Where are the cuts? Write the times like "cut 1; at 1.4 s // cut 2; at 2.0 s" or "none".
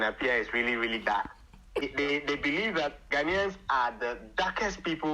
cut 1; at 1.8 s // cut 2; at 3.0 s